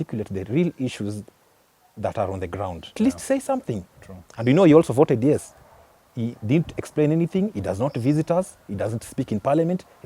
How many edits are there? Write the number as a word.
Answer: one